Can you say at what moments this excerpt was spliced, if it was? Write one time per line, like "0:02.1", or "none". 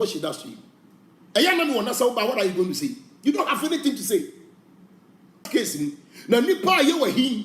0:05.5